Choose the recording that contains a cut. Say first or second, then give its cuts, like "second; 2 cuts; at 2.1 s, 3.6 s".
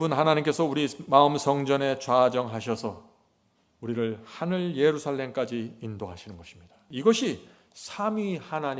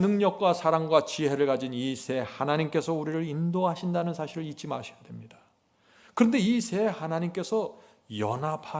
first; 1 cut; at 6.8 s